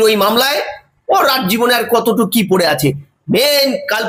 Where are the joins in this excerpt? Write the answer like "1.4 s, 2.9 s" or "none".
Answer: none

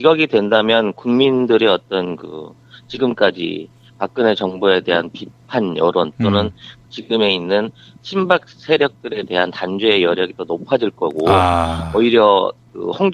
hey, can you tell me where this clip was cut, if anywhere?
8.4 s

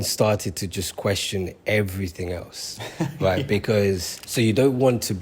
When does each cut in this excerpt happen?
4.2 s

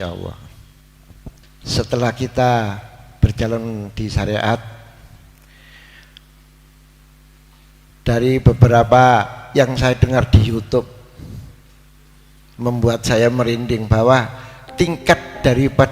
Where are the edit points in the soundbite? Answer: 1.5 s

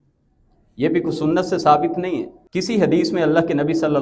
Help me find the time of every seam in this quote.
2.4 s

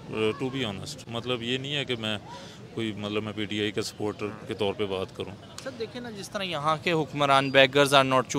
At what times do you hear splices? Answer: none

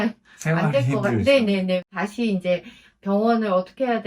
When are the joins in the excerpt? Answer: 1.8 s

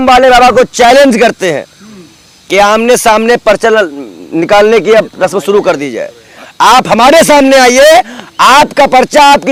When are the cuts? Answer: none

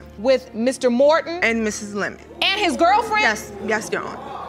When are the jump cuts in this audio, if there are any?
none

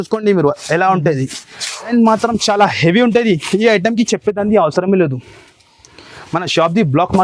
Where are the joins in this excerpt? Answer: 1.9 s

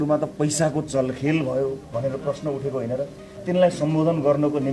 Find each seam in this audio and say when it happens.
none

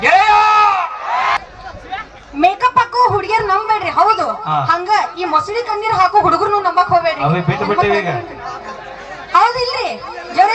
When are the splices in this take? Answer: 1.4 s

